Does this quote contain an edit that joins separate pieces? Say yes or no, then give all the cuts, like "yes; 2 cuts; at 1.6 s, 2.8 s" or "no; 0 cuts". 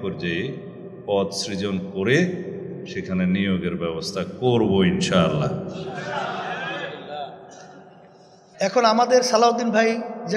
yes; 1 cut; at 8.5 s